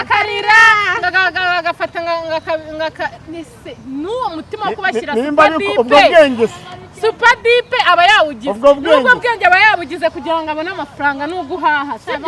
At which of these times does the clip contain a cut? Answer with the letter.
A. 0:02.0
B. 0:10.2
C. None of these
C